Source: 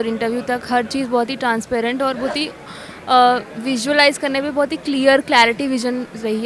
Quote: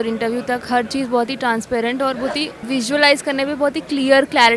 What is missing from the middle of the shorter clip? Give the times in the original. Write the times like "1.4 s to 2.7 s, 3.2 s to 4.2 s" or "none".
2.6 s to 3.5 s